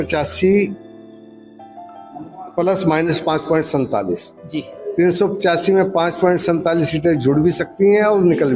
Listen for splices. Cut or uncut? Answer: uncut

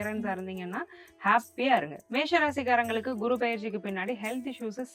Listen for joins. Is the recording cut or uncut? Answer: cut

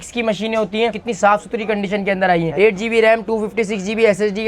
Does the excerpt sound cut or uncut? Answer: cut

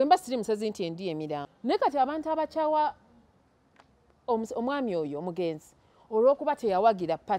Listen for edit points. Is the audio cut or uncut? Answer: cut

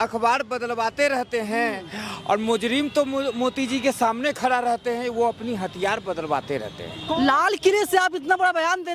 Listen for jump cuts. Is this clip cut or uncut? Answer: cut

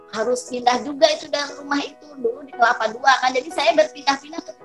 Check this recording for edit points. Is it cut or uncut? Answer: uncut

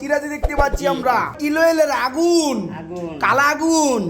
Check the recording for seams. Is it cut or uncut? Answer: cut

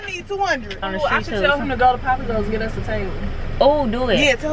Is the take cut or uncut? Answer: cut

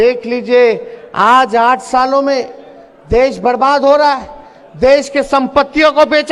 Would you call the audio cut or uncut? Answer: uncut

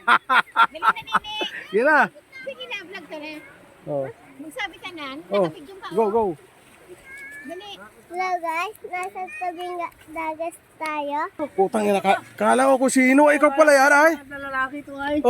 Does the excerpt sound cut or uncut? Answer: cut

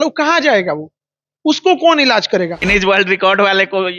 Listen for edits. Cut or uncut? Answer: cut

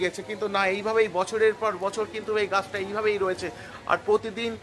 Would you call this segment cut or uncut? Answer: uncut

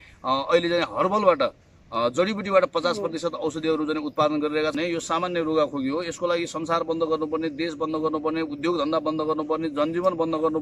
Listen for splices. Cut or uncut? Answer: cut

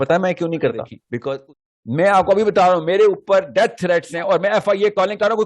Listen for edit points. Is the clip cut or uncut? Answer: cut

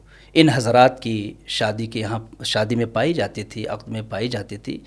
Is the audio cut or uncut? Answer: uncut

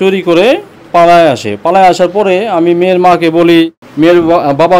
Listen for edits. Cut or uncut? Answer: cut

